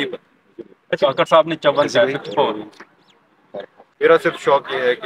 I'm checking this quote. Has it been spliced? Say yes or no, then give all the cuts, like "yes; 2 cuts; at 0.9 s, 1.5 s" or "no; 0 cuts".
yes; 1 cut; at 3.8 s